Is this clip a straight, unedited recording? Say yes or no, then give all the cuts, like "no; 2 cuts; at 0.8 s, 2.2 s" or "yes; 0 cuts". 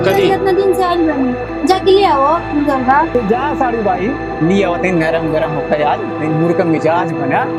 yes; 0 cuts